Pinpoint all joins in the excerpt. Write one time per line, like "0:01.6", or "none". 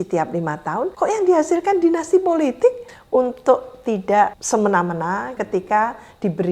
0:00.9
0:02.9
0:04.4
0:05.4